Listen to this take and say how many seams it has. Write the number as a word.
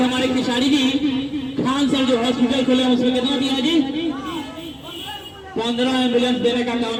zero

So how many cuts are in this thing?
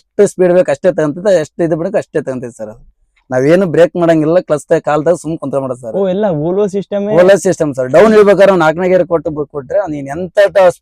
zero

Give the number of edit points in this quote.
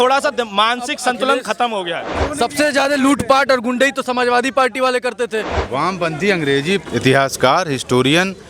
two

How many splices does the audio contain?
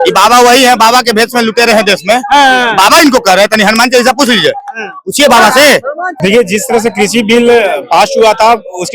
one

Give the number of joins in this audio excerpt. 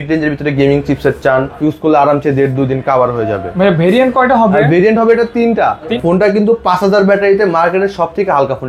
two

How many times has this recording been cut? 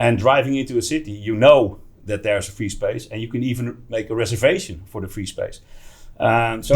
zero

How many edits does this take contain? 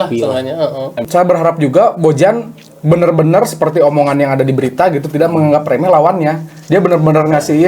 one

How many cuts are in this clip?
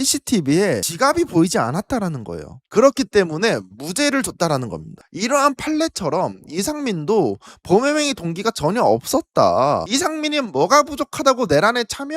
one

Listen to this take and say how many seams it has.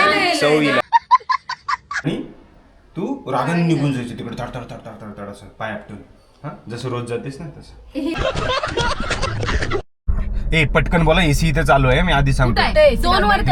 two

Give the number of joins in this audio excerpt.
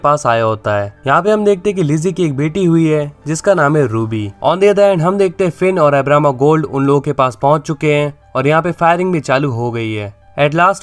one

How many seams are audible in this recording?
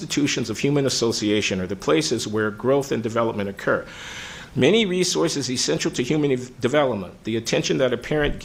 zero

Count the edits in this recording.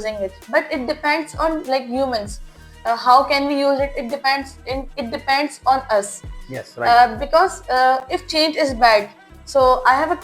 zero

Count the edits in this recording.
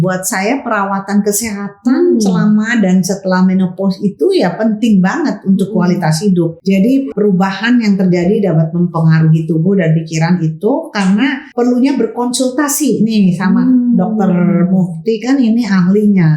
two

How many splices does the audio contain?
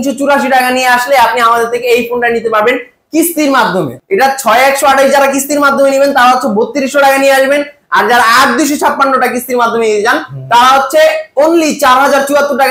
one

